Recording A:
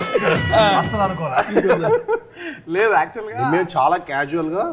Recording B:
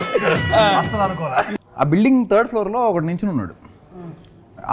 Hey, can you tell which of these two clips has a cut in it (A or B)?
B